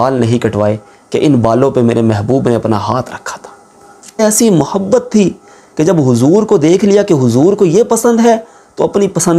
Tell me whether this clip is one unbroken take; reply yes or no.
no